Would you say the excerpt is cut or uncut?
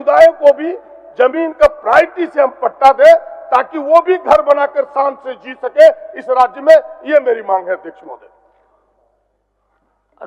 uncut